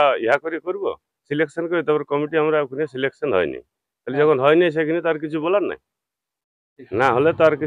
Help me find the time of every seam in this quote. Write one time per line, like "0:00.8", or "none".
none

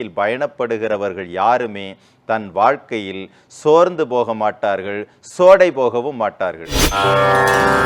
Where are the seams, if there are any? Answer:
0:06.9

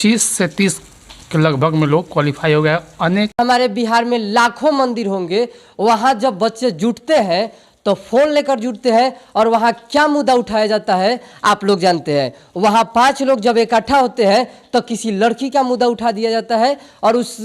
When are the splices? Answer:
0:03.4

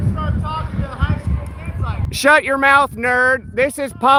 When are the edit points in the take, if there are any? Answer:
none

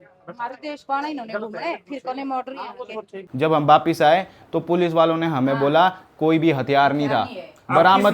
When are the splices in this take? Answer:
0:03.3

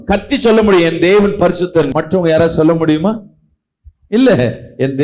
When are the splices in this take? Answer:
none

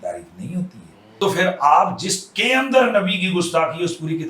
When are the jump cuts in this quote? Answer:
0:01.0

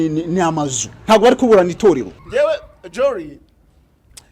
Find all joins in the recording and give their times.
0:02.1

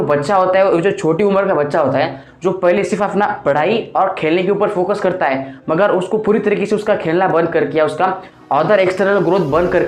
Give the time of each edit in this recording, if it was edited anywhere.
none

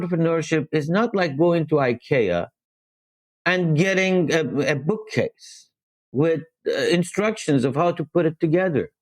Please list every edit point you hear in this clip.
none

